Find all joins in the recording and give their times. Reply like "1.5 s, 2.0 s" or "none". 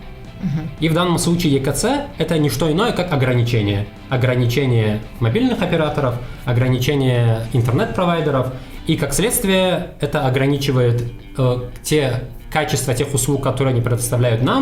none